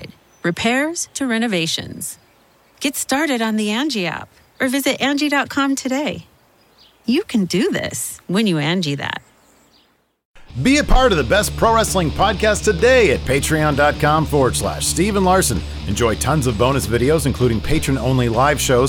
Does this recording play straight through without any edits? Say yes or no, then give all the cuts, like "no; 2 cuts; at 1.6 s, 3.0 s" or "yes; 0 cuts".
no; 1 cut; at 10.2 s